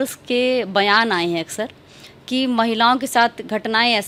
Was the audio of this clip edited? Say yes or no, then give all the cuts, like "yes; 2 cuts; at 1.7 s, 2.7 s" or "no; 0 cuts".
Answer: no; 0 cuts